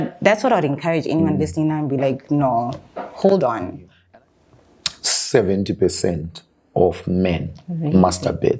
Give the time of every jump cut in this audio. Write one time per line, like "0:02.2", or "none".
0:04.0